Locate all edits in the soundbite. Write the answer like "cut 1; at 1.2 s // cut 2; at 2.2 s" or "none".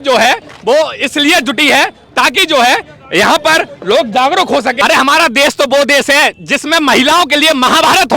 cut 1; at 4.8 s

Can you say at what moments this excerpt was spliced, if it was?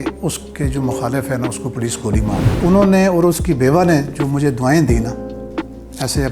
cut 1; at 2.5 s

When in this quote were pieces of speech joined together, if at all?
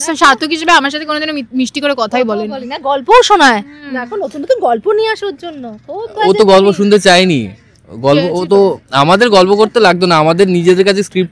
none

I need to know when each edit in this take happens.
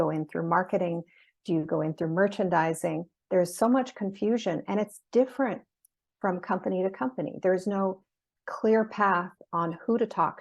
cut 1; at 8.3 s

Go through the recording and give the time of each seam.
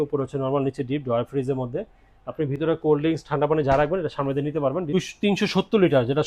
cut 1; at 4.9 s

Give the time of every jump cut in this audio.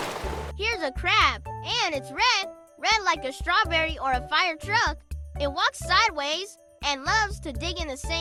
none

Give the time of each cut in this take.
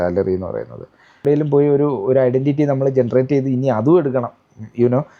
cut 1; at 1.2 s

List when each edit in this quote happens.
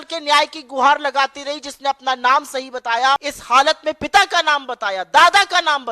cut 1; at 3.3 s

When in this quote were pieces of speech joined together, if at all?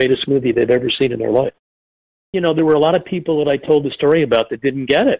cut 1; at 2.1 s

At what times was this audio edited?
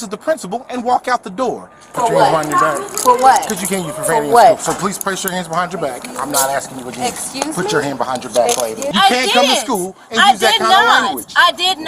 cut 1; at 1.8 s // cut 2; at 8.9 s

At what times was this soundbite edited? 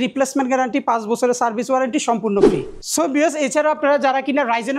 none

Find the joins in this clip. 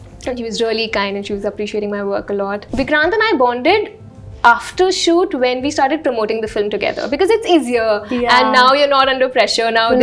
cut 1; at 2.7 s

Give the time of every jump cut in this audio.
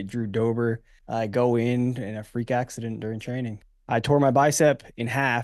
cut 1; at 0.9 s // cut 2; at 3.7 s

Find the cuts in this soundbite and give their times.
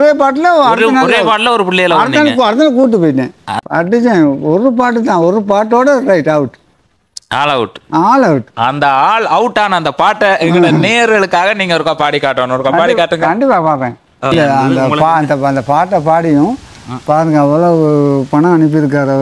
cut 1; at 3.5 s // cut 2; at 14.3 s

